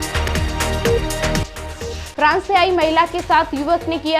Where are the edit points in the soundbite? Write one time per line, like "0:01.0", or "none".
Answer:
0:01.4